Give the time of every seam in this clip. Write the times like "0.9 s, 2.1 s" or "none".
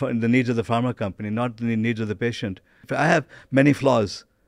2.9 s